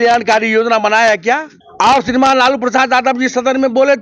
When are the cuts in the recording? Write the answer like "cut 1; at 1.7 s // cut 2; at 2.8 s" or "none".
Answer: cut 1; at 1.6 s